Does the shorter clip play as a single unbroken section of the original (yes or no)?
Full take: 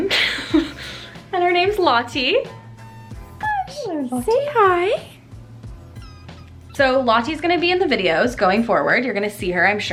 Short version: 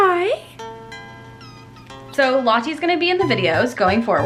yes